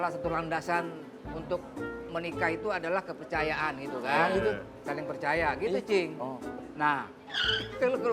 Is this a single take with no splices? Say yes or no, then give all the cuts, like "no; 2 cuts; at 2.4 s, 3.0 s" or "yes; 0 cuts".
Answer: yes; 0 cuts